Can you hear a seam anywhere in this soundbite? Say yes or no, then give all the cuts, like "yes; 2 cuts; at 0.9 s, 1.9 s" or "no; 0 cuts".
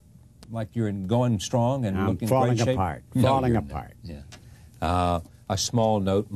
yes; 1 cut; at 5.3 s